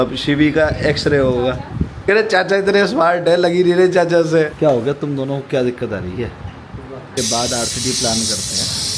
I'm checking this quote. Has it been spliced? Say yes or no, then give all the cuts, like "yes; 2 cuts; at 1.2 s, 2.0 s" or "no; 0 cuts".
yes; 3 cuts; at 1.9 s, 4.5 s, 7.1 s